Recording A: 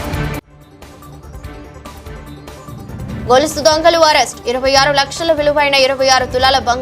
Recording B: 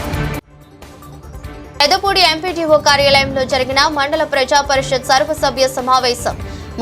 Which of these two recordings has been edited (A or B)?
B